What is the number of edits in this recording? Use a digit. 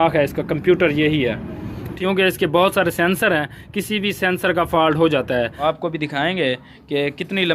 2